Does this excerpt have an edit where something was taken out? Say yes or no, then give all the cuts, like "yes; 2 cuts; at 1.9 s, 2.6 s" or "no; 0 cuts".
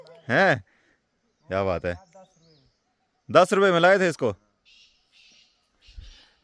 no; 0 cuts